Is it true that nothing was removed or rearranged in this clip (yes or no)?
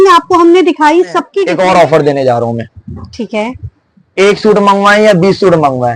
no